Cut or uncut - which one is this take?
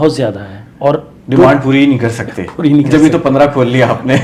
uncut